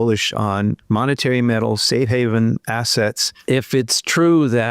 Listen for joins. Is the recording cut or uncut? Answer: cut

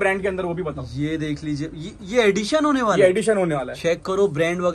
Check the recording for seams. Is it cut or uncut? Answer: uncut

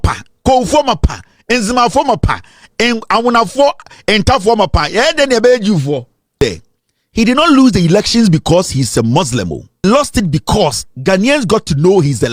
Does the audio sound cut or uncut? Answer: cut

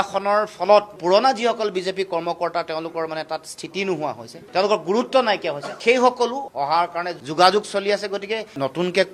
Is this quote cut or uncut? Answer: cut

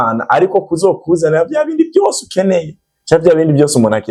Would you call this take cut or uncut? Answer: uncut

